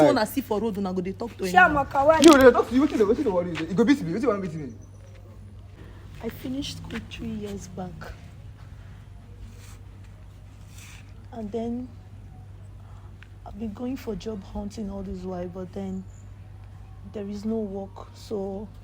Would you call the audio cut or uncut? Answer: cut